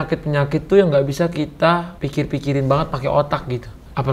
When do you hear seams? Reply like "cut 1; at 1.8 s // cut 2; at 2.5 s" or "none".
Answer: none